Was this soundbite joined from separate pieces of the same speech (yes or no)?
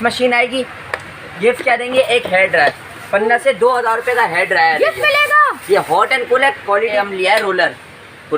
yes